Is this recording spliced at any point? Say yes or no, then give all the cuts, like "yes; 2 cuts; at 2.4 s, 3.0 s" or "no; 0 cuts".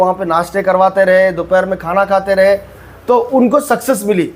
no; 0 cuts